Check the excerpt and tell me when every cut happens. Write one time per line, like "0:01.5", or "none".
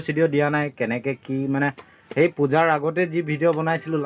none